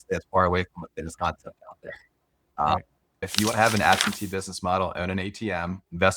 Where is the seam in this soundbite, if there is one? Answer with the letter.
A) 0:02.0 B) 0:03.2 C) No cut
B